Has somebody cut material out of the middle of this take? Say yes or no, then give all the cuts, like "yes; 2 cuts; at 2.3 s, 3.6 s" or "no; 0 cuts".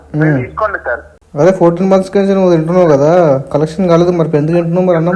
yes; 1 cut; at 1.2 s